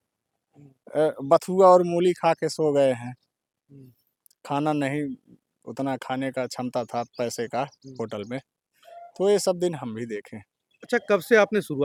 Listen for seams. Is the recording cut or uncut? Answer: uncut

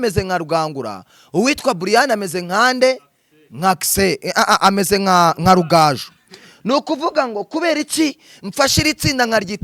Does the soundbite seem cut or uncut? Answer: uncut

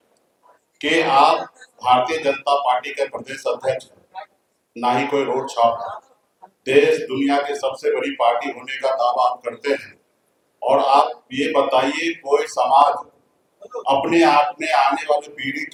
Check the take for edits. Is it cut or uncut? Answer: uncut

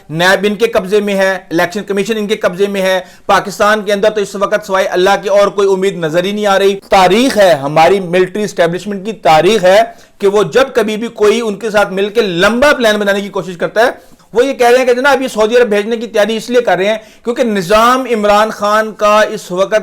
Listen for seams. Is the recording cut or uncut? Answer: cut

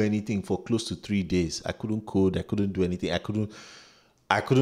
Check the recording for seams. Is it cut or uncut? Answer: uncut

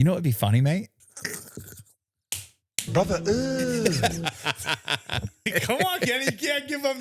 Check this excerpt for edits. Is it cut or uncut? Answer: cut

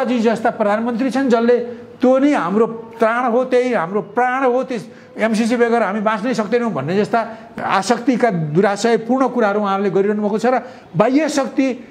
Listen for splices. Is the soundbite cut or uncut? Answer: uncut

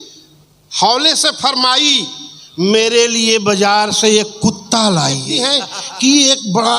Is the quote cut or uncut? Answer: cut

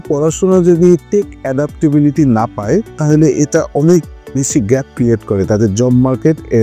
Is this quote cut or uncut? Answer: uncut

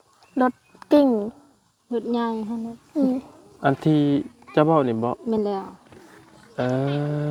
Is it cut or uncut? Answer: uncut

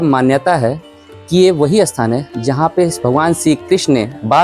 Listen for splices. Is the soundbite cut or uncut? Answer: uncut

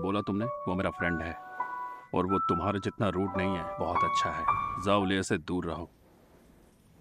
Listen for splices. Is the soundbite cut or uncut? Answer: cut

